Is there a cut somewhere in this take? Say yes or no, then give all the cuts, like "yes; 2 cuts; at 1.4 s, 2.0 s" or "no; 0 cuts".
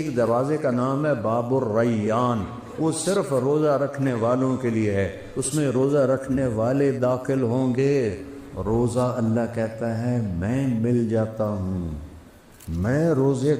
yes; 1 cut; at 8.2 s